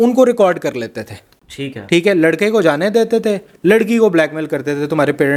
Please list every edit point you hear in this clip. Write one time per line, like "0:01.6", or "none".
none